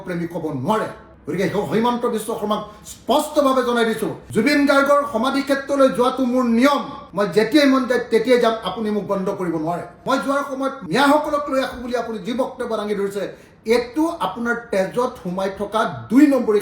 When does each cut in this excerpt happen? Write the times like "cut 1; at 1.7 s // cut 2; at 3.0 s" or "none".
cut 1; at 4.2 s // cut 2; at 9.9 s